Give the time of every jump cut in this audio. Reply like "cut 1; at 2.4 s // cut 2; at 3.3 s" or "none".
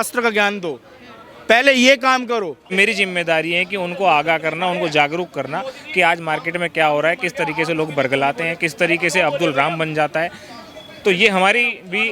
cut 1; at 2.7 s